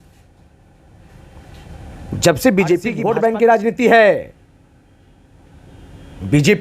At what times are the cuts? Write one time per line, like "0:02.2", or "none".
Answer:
0:02.9